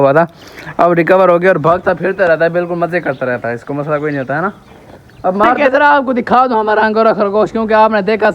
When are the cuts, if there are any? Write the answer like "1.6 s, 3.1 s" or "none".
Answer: 5.6 s